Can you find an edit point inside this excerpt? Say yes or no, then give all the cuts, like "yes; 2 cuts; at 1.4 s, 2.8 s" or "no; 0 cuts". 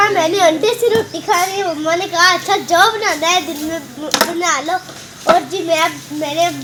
no; 0 cuts